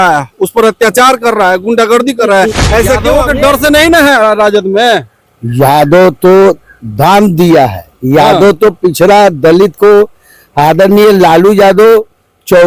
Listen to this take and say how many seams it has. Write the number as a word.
one